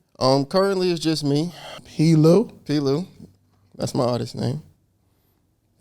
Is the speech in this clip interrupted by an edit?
yes; 1 cut; at 1.8 s

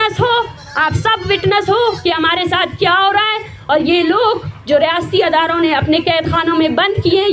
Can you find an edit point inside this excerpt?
no; 0 cuts

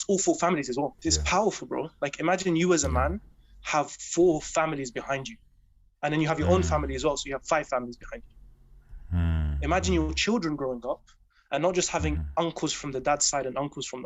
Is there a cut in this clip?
yes; 1 cut; at 1.0 s

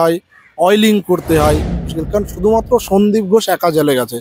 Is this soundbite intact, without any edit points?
no; 1 cut; at 1.7 s

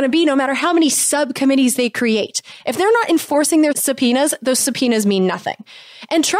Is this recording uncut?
yes; 0 cuts

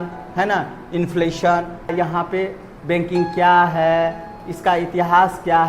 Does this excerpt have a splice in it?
yes; 1 cut; at 1.9 s

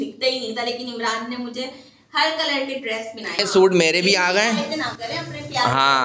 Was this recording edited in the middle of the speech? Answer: yes; 1 cut; at 3.4 s

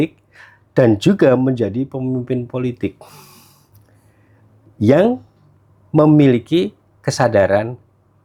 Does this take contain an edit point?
no; 0 cuts

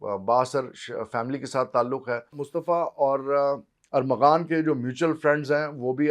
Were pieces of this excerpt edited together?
yes; 1 cut; at 2.4 s

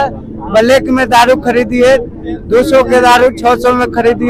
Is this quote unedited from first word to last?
yes; 0 cuts

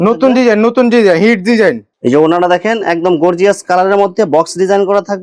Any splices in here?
yes; 1 cut; at 1.9 s

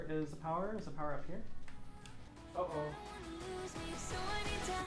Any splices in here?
no; 0 cuts

